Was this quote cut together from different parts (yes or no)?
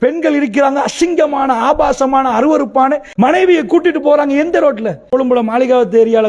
yes